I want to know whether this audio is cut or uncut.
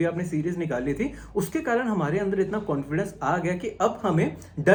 uncut